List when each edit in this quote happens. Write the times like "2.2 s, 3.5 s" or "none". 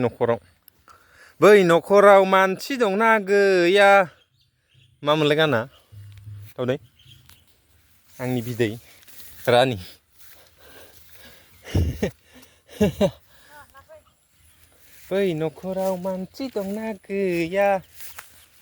4.5 s, 9.1 s